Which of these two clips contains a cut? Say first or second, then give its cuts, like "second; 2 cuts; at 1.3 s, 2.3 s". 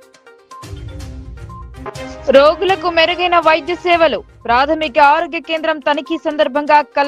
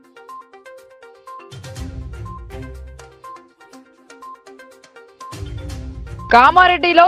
first; 1 cut; at 1.6 s